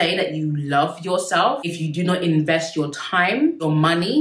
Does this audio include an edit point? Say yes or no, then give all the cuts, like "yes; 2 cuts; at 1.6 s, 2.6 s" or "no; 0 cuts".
no; 0 cuts